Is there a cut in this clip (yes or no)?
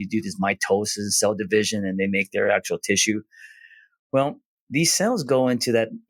no